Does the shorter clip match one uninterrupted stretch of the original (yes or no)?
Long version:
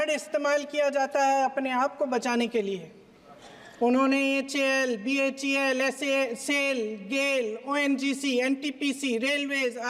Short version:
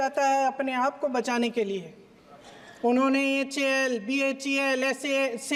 yes